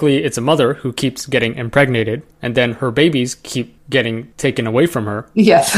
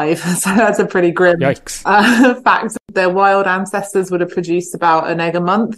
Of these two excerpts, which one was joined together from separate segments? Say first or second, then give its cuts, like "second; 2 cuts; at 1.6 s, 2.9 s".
second; 2 cuts; at 1.7 s, 2.8 s